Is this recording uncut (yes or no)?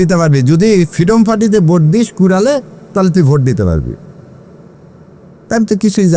yes